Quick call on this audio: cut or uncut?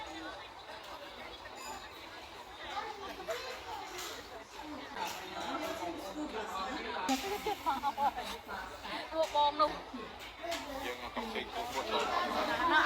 cut